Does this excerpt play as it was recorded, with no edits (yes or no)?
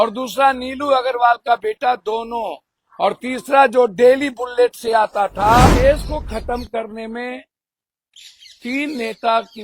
no